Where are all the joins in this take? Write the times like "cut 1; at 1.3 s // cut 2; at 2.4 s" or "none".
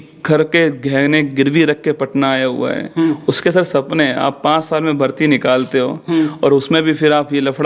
none